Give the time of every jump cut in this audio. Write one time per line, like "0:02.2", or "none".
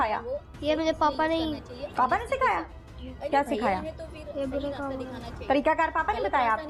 none